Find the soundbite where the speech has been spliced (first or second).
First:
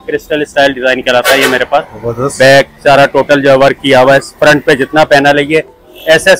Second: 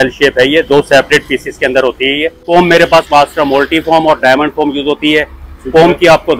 second